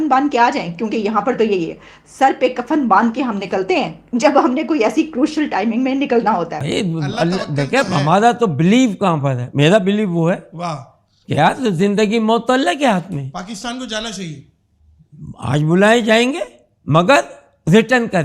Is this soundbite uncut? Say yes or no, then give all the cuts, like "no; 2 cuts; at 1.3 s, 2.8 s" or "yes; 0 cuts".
no; 1 cut; at 6.6 s